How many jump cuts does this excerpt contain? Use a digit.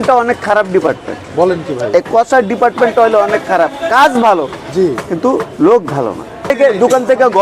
1